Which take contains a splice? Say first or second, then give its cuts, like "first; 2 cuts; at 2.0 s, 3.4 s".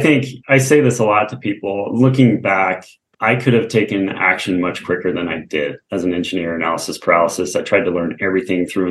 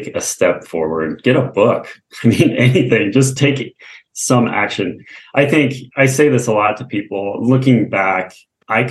first; 1 cut; at 5.8 s